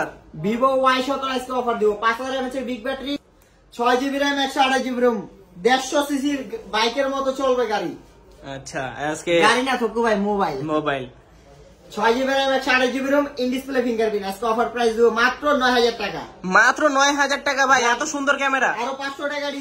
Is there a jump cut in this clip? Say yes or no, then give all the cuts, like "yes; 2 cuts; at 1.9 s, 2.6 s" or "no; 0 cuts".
yes; 1 cut; at 3.3 s